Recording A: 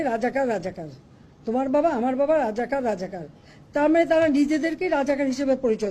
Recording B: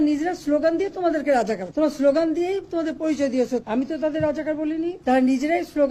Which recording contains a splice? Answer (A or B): B